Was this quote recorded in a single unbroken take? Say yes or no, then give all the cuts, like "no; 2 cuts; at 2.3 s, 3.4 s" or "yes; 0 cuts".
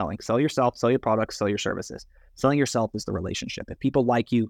yes; 0 cuts